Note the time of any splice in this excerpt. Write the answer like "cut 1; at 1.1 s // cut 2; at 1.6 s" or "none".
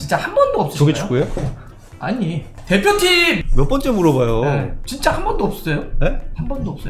cut 1; at 2.5 s // cut 2; at 3.4 s